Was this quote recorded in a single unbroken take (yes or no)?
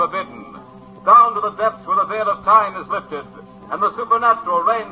no